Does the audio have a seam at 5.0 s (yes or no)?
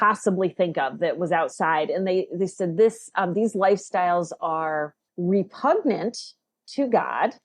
yes